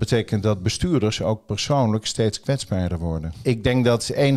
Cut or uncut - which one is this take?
cut